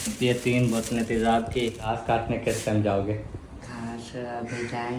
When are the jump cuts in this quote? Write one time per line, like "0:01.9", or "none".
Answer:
0:02.0